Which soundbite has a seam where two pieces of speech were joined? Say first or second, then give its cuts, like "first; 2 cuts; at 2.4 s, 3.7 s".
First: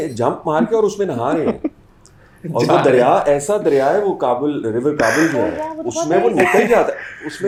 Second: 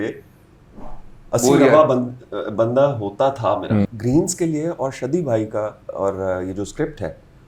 second; 1 cut; at 3.9 s